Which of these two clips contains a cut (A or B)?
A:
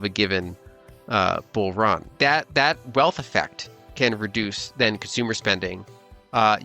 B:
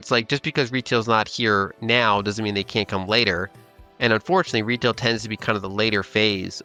A